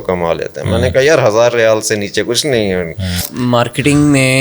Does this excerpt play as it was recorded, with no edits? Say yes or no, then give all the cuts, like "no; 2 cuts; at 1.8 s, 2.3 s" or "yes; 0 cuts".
no; 1 cut; at 3.3 s